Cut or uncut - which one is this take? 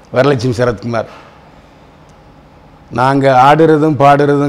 uncut